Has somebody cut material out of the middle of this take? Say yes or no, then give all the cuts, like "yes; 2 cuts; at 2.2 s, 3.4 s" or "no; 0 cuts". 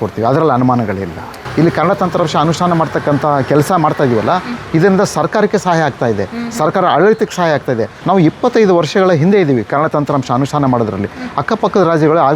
yes; 2 cuts; at 1.4 s, 7.9 s